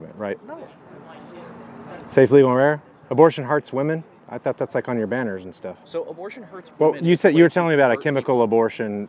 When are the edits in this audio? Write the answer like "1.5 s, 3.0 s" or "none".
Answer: none